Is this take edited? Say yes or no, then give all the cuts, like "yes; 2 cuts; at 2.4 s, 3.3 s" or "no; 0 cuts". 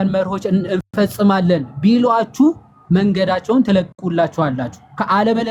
no; 0 cuts